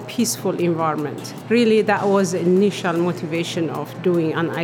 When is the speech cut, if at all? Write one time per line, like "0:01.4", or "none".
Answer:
0:01.3